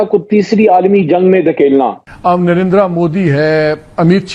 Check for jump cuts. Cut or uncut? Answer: cut